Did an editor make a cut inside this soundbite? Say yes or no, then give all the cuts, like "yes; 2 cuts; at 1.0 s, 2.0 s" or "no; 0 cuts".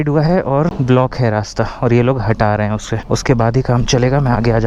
no; 0 cuts